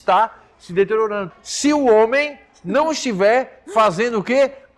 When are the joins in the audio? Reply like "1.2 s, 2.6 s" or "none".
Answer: 1.3 s